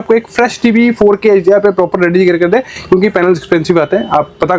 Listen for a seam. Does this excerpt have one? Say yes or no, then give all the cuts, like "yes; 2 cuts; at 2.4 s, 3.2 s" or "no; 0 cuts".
no; 0 cuts